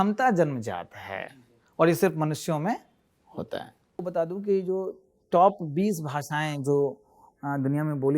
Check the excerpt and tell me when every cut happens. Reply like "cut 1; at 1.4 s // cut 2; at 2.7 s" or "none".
cut 1; at 4.0 s